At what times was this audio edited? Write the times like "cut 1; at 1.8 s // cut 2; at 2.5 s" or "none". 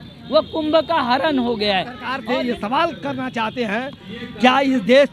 cut 1; at 2.1 s